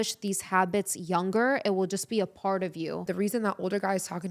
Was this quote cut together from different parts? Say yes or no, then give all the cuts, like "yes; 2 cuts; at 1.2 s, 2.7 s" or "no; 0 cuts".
yes; 1 cut; at 3.1 s